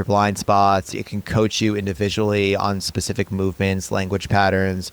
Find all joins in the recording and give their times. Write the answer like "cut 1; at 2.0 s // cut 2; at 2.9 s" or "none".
cut 1; at 0.9 s